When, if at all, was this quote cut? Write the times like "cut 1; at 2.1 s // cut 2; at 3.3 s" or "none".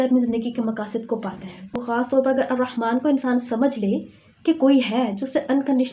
cut 1; at 2.0 s